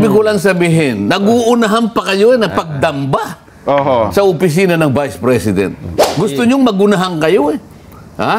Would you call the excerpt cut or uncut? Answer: uncut